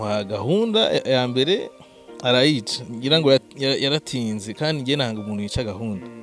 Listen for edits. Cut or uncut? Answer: uncut